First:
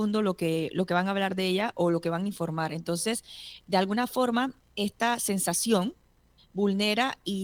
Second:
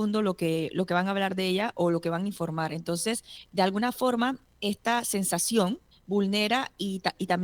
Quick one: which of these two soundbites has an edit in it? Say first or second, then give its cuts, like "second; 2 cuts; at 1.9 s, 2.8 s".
second; 2 cuts; at 3.4 s, 5.9 s